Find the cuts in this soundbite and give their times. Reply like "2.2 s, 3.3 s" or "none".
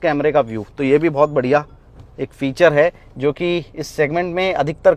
none